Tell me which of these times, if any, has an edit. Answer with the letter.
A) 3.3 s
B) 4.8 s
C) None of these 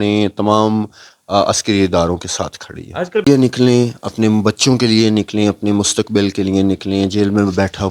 A